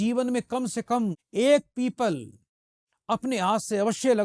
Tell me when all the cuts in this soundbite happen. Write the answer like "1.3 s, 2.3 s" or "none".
1.2 s